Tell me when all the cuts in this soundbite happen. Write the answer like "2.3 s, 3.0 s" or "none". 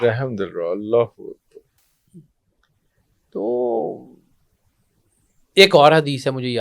none